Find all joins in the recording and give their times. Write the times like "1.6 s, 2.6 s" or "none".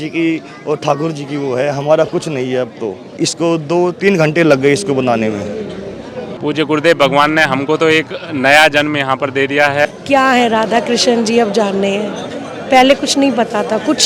3.1 s, 6.3 s, 9.8 s